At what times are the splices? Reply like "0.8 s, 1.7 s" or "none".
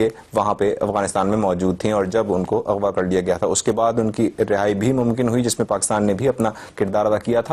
4.2 s